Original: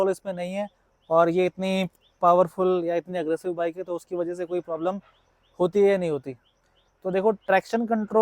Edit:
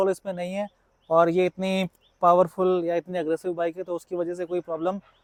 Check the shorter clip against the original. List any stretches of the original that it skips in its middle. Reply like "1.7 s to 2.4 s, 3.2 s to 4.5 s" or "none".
none